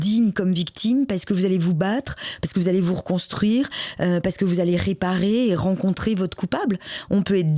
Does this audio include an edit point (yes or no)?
no